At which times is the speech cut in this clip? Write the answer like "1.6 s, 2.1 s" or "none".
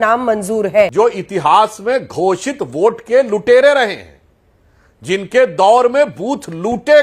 0.9 s